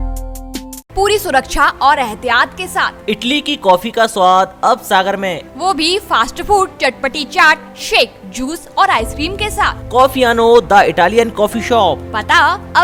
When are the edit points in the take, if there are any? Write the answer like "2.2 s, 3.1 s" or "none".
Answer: none